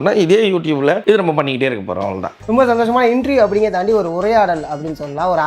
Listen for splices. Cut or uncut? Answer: cut